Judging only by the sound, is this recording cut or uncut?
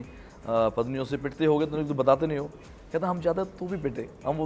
uncut